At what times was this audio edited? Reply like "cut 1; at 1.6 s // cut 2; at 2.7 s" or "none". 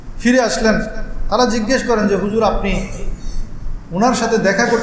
none